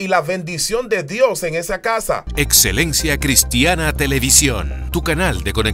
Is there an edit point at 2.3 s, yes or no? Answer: yes